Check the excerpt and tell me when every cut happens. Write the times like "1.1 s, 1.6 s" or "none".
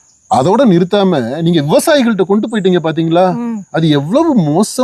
none